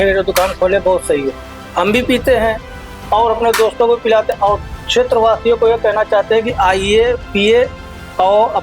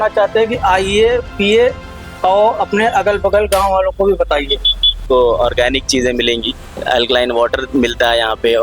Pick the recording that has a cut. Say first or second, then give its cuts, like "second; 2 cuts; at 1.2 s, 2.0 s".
second; 2 cuts; at 5.0 s, 6.7 s